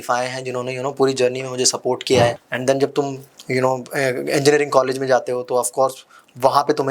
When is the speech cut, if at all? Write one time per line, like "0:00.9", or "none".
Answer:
0:02.4